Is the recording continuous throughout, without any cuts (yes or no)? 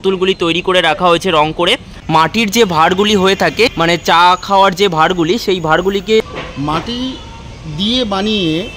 no